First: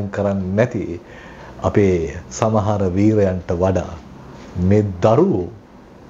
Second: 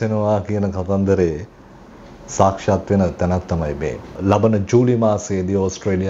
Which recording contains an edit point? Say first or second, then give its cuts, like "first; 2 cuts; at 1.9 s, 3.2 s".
second; 1 cut; at 4.1 s